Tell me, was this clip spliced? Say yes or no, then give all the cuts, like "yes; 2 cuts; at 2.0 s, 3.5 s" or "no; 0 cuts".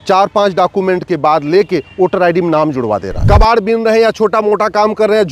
yes; 1 cut; at 3.1 s